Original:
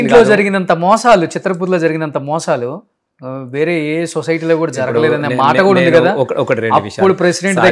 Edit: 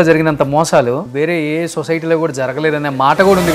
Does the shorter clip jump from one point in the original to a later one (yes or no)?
yes